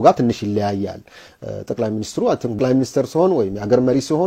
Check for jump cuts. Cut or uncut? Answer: cut